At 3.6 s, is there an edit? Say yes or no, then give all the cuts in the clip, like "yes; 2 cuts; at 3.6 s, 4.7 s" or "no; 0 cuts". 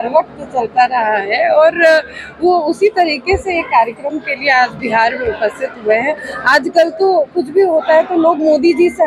no; 0 cuts